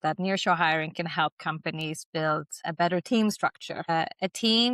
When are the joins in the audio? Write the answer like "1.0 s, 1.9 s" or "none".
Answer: 2.6 s, 3.9 s